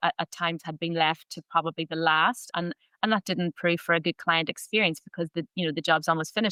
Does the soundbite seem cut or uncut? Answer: uncut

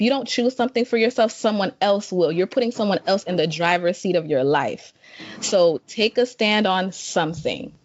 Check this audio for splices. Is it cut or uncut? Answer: uncut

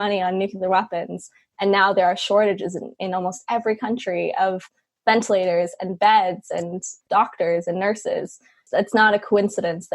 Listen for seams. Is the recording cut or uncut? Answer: cut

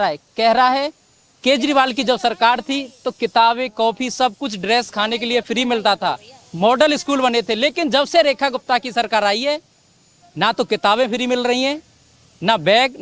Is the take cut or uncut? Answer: uncut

